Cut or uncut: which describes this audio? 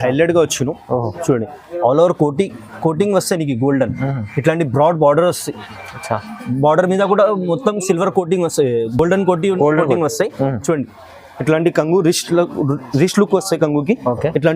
uncut